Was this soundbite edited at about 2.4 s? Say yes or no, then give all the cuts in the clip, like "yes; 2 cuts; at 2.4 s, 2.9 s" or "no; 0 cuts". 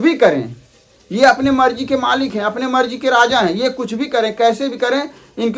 no; 0 cuts